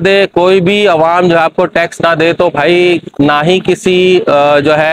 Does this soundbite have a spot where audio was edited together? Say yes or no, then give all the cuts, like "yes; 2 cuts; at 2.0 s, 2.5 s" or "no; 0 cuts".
no; 0 cuts